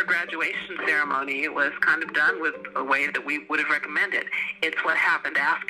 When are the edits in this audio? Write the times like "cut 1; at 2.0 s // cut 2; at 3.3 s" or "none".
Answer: cut 1; at 4.3 s